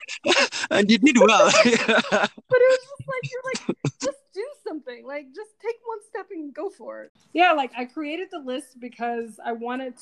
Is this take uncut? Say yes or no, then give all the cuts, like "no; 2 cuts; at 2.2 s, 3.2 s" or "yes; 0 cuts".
no; 1 cut; at 7.1 s